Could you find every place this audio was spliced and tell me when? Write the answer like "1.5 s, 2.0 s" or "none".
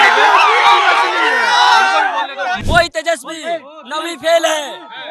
2.5 s